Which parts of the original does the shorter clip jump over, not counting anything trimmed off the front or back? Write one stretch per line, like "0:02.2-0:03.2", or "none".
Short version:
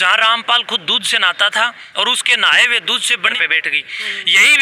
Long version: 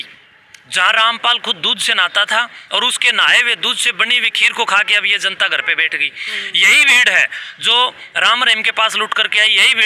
0:04.2-0:05.7